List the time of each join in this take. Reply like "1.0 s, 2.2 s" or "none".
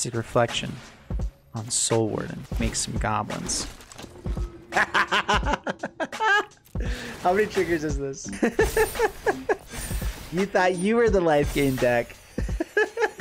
2.4 s, 8.2 s, 9.6 s

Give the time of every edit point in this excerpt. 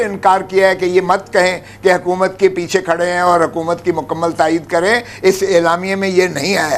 none

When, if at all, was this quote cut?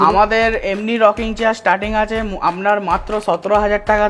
none

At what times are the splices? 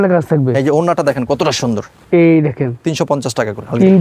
2.0 s

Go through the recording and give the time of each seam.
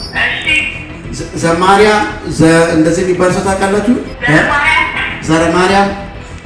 none

